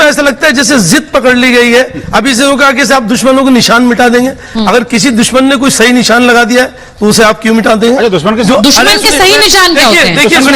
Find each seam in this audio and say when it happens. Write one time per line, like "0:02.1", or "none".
none

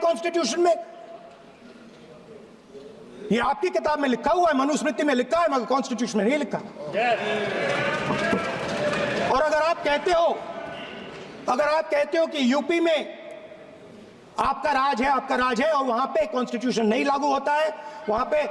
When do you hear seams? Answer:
none

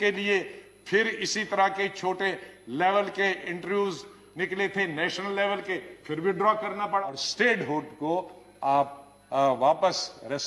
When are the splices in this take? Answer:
0:07.2

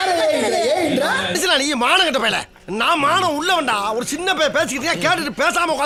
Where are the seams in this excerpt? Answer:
none

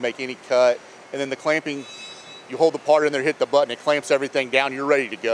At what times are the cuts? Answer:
0:01.0
0:02.4

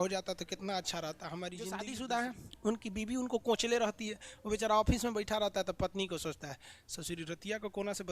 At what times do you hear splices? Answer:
0:01.8

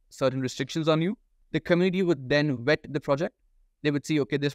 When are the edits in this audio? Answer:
0:01.3

